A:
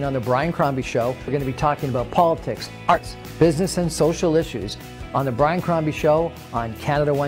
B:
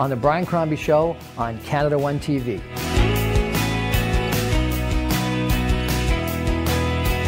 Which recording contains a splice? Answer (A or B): A